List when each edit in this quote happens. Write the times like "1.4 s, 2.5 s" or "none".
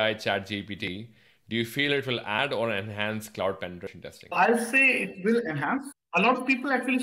6.0 s